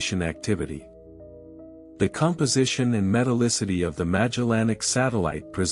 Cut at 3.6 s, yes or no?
yes